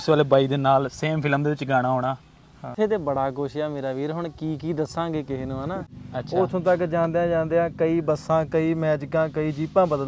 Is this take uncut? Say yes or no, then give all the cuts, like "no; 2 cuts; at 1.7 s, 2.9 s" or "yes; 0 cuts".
no; 2 cuts; at 2.7 s, 6.0 s